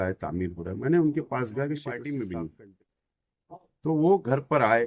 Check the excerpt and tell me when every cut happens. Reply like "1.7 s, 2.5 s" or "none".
1.9 s